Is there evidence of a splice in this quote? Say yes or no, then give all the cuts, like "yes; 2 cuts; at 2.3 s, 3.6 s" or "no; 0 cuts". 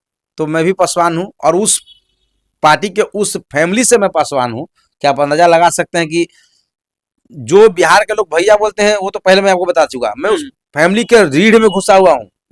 no; 0 cuts